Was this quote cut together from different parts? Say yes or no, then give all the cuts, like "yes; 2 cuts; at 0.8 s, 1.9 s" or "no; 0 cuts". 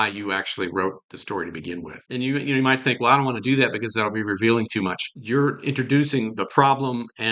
yes; 2 cuts; at 2.0 s, 5.1 s